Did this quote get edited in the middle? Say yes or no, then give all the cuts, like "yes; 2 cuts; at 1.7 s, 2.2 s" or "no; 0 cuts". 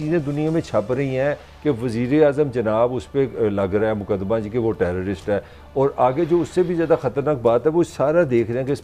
no; 0 cuts